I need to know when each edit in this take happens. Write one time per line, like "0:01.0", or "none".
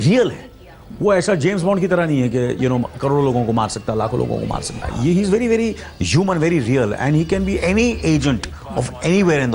0:04.8